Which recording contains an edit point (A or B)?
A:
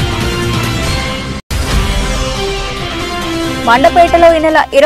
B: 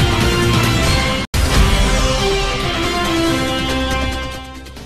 A